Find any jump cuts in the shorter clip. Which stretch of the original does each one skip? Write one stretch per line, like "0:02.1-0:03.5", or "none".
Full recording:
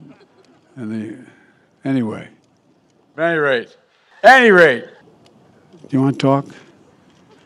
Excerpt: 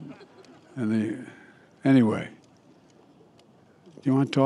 0:03.0-0:04.9